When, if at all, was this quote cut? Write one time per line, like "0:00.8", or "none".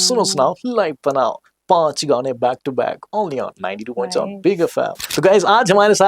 0:05.0